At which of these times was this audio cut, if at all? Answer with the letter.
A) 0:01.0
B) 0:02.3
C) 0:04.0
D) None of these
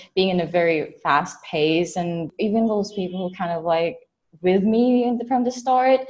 B